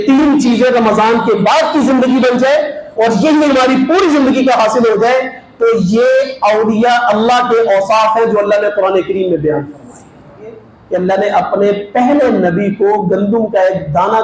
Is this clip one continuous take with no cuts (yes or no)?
no